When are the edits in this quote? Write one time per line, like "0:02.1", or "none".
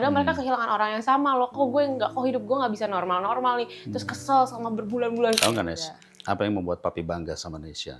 0:05.4